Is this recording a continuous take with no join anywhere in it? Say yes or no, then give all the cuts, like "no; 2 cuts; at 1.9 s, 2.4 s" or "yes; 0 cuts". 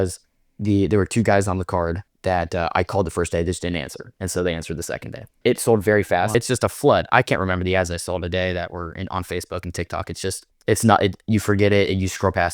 no; 3 cuts; at 2.1 s, 5.2 s, 6.3 s